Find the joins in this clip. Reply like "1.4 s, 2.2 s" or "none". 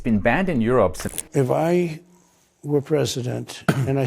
1.1 s

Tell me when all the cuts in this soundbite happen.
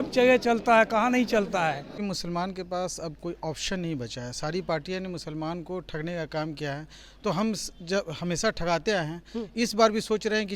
2.0 s

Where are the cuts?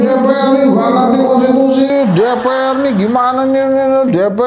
none

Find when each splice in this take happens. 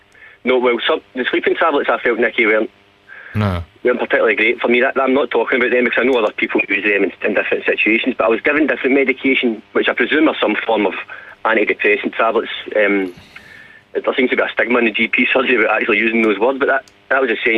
none

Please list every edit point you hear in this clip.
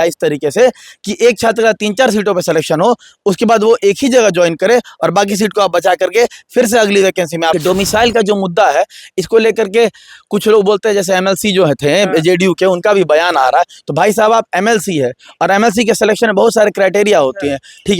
7.5 s

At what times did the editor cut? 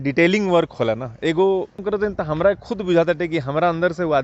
1.8 s

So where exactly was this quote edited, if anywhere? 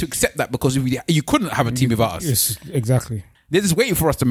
3.2 s

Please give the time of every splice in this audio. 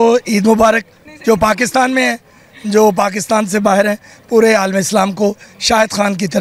none

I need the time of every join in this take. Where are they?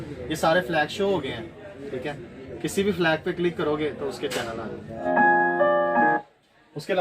5.1 s

